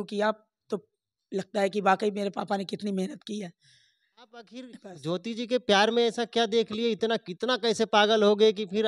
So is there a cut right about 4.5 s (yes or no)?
yes